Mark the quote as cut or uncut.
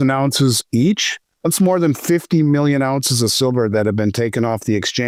uncut